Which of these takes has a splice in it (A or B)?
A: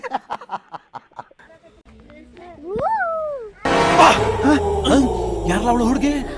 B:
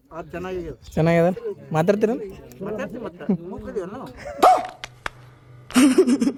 A